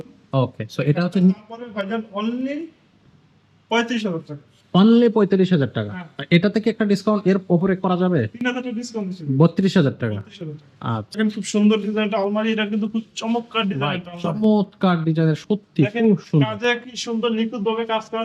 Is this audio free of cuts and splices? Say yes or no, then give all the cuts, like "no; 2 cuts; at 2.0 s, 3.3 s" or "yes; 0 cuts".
no; 1 cut; at 11.2 s